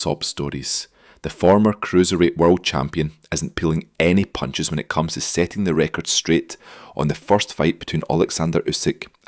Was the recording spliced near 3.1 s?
yes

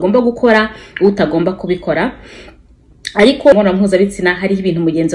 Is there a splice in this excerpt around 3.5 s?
yes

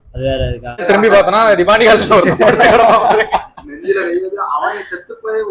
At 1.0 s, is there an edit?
yes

